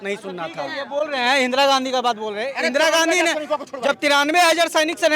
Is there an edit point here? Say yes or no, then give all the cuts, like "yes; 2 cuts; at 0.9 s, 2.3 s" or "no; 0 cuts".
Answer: no; 0 cuts